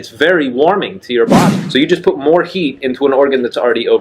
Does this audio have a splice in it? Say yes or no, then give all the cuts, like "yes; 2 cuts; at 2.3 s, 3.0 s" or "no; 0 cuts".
yes; 1 cut; at 1.6 s